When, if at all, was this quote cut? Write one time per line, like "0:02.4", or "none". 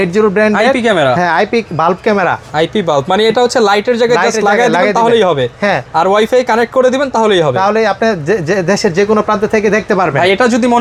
none